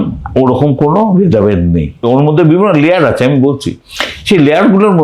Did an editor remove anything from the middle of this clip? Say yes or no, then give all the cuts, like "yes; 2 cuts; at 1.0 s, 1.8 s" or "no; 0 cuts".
yes; 1 cut; at 2.0 s